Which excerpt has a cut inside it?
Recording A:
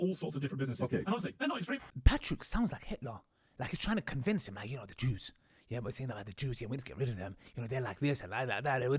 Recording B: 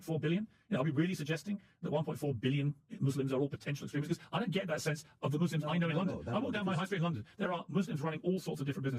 A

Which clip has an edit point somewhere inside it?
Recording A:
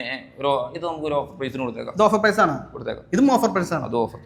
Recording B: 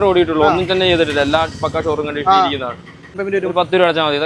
B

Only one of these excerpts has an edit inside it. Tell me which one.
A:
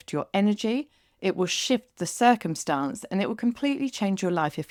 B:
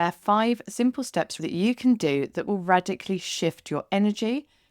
B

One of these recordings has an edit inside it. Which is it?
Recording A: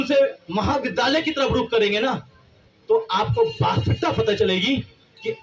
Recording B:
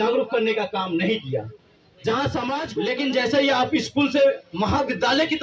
B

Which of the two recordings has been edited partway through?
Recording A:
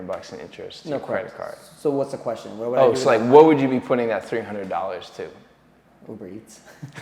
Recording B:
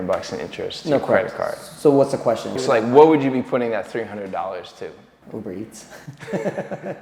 B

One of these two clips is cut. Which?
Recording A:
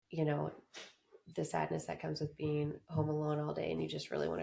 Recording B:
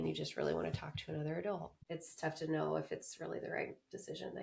B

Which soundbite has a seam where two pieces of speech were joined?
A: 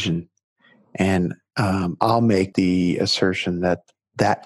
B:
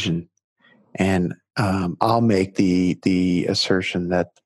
A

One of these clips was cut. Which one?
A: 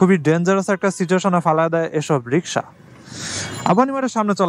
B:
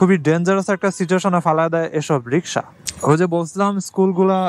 B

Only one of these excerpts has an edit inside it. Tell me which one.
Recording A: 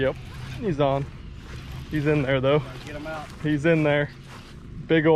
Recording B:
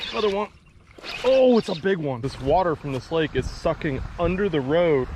B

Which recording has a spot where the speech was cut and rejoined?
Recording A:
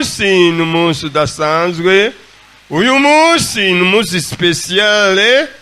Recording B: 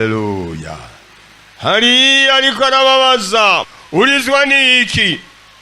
B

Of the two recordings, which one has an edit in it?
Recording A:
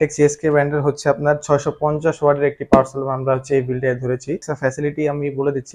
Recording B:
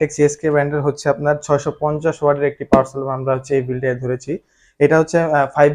A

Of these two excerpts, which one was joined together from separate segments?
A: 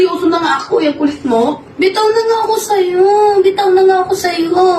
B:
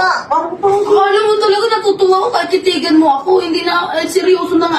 A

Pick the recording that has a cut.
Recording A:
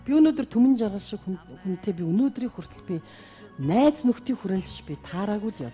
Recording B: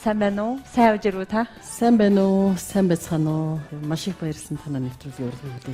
B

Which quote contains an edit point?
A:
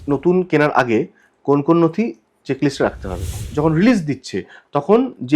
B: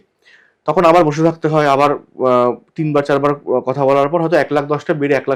A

